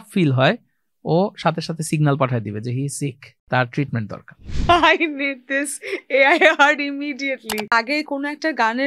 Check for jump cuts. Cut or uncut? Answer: cut